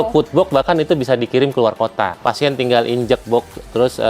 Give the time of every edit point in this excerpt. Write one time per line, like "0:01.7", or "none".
0:02.1

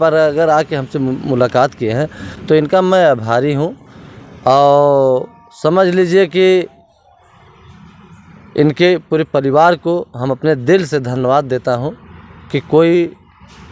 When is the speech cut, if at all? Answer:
none

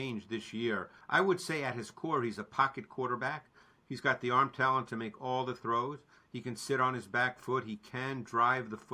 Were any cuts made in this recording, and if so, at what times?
0:01.0

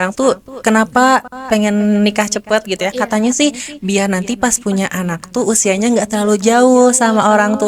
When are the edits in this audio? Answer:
none

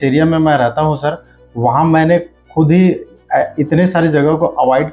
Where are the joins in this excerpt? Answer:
none

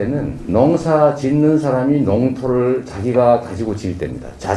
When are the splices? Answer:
none

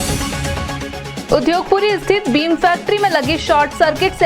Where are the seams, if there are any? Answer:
0:01.2

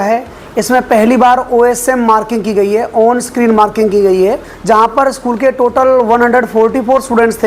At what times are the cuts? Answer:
0:04.5

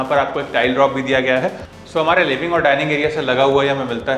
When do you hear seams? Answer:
0:01.7

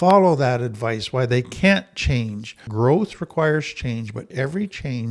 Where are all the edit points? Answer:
0:02.6
0:04.3

